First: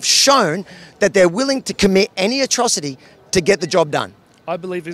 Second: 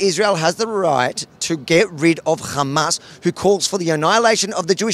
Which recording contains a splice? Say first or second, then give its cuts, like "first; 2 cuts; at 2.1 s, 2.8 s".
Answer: first; 1 cut; at 1.7 s